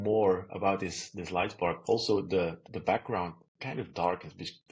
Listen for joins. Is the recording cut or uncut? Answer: cut